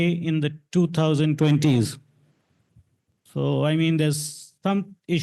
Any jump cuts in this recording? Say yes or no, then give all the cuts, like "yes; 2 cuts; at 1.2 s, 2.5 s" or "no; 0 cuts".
no; 0 cuts